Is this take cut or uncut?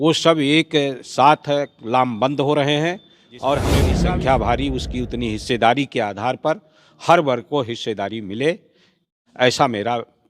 cut